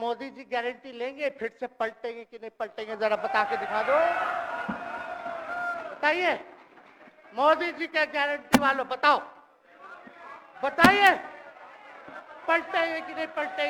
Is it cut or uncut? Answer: uncut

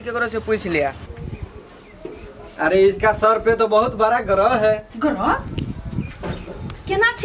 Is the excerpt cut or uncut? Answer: cut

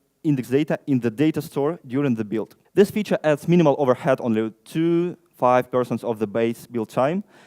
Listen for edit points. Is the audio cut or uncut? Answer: cut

